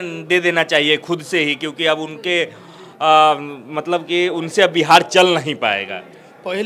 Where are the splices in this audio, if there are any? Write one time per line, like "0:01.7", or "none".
none